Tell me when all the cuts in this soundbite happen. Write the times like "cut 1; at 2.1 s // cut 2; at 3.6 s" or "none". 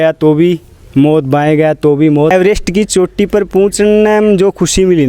cut 1; at 2.3 s